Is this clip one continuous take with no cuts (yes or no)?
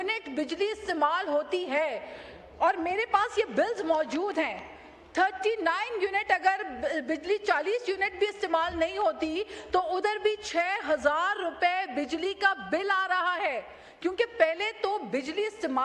yes